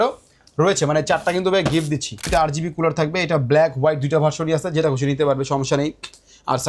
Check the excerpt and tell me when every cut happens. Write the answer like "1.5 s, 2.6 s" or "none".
2.2 s